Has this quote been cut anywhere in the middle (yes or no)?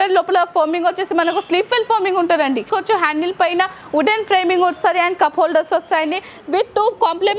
yes